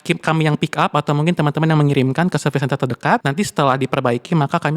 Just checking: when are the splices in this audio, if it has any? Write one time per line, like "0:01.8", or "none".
0:03.2